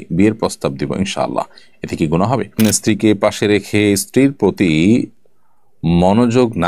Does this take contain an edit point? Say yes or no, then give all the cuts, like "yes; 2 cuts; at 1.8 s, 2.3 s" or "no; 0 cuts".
yes; 1 cut; at 2.6 s